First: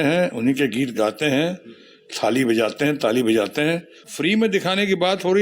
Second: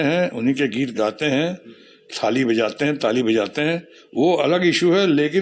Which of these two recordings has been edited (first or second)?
first